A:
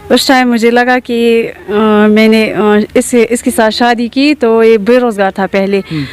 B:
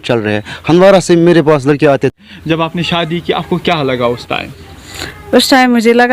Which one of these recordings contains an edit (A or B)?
B